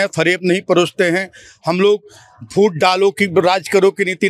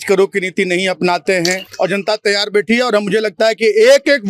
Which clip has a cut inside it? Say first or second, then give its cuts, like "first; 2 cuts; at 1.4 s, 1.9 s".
second; 1 cut; at 1.7 s